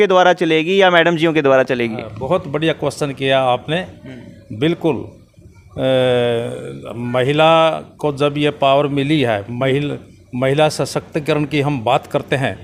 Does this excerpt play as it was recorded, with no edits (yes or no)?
yes